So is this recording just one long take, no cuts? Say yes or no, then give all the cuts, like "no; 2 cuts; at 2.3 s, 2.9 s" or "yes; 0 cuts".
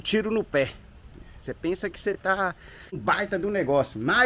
no; 1 cut; at 3.0 s